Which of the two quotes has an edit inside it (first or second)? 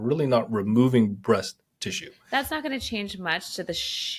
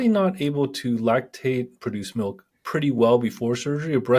first